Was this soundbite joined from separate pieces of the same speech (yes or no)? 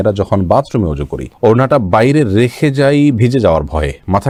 no